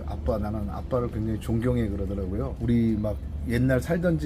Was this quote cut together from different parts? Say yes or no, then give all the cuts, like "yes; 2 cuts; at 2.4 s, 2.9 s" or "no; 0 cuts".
yes; 1 cut; at 2.5 s